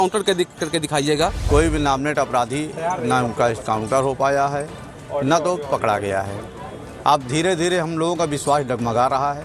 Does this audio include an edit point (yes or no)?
yes